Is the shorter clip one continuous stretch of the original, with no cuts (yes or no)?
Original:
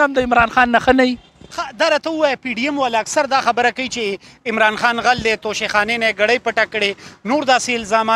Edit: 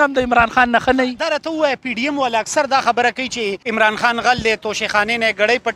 no